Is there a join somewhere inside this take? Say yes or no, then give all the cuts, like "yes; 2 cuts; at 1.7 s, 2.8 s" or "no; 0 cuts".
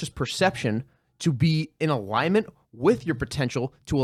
no; 0 cuts